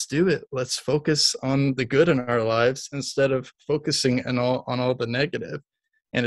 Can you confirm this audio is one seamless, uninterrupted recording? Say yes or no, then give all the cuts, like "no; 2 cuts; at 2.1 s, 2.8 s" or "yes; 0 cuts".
yes; 0 cuts